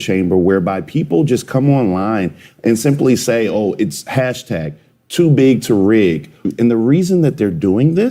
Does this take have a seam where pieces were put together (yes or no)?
yes